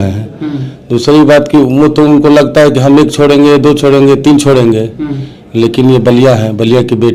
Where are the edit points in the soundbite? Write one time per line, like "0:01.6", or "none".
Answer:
none